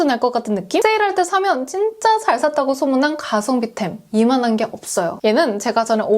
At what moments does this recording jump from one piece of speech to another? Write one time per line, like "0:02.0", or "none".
0:00.8
0:05.1